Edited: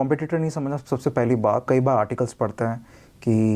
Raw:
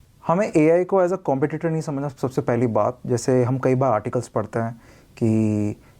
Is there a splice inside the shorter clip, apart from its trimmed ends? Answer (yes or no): yes